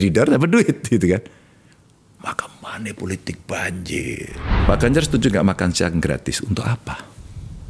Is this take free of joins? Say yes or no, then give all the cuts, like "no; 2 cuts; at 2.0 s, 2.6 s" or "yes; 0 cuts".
no; 1 cut; at 4.5 s